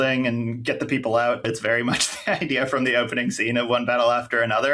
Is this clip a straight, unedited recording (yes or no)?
no